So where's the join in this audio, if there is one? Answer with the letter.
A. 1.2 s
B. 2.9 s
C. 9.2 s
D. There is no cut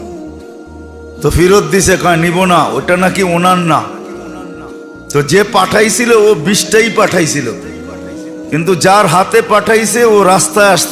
A